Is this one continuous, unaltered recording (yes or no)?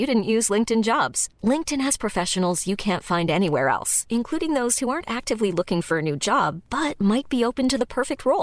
yes